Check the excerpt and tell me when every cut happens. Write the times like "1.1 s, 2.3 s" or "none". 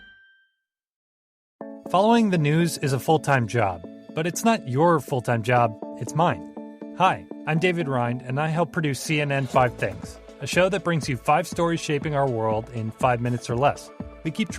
0.9 s